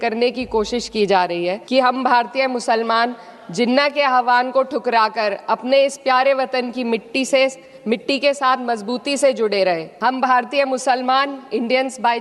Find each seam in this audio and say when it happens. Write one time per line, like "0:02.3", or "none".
0:01.6
0:09.9